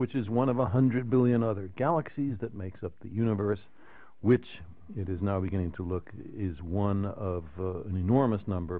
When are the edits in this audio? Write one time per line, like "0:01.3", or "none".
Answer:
none